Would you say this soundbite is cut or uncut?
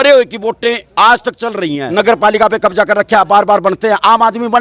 cut